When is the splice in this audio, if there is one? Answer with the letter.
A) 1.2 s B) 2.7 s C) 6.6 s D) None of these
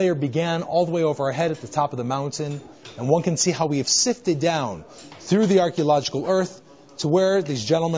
D